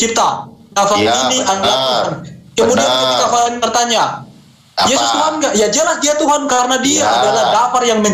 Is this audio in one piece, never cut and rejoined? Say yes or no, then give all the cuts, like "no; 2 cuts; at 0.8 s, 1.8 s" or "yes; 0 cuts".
yes; 0 cuts